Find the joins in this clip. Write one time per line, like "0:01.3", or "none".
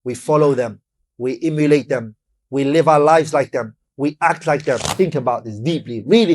0:04.9

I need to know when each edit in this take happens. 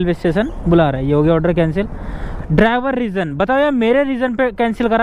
0:02.3

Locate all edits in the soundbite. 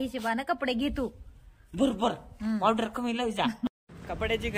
0:03.7

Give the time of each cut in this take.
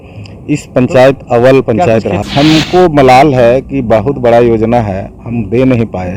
0:02.2

